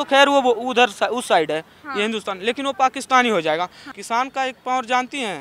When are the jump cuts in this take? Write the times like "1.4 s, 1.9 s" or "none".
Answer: 3.8 s